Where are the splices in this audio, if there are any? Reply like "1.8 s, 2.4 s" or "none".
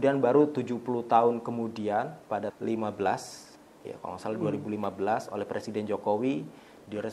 2.5 s